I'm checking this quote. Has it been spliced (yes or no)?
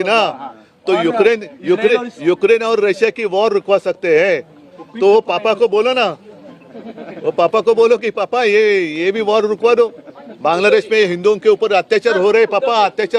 no